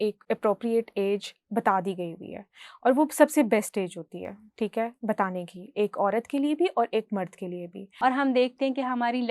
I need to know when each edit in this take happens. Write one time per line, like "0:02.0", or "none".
0:07.9